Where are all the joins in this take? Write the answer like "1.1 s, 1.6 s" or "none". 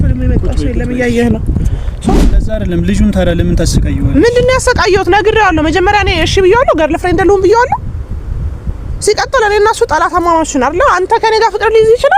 2.1 s